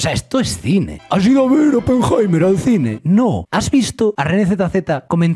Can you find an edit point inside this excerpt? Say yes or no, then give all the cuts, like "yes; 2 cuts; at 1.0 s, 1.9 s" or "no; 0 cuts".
yes; 1 cut; at 0.9 s